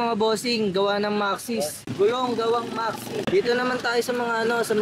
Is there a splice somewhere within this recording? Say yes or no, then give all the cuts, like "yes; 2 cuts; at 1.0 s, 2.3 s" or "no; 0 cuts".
yes; 1 cut; at 3.2 s